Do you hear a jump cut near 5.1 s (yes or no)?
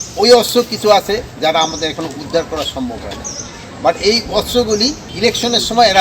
yes